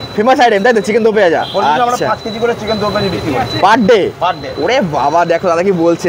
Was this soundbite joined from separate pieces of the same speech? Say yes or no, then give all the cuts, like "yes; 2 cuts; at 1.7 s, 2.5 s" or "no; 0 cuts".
no; 0 cuts